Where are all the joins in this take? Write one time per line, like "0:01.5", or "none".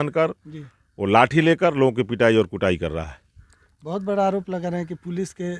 none

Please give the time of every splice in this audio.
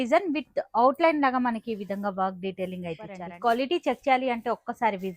0:03.3

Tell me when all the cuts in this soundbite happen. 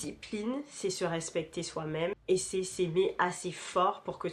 none

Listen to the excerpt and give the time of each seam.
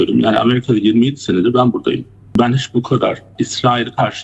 0:02.4
0:03.3

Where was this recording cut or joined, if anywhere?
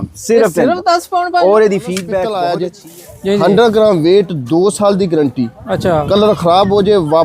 0:02.3

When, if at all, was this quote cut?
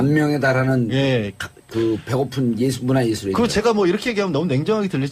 0:02.7

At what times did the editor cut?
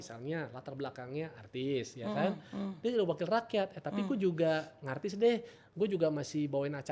none

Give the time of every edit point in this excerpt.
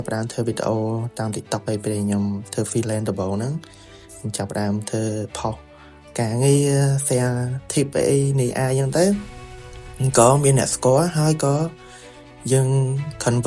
none

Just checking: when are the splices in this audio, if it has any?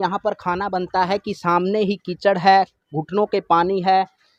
none

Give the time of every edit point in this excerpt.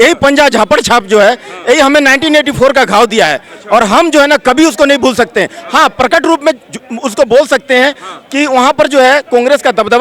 none

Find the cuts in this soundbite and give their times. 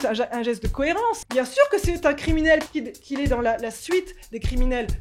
0:01.2
0:02.7

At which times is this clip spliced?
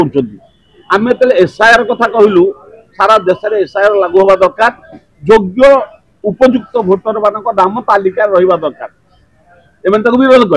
none

